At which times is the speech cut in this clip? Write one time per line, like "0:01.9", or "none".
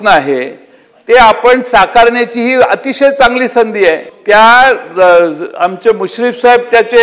0:04.1